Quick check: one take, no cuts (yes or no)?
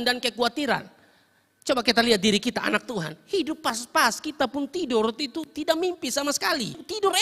yes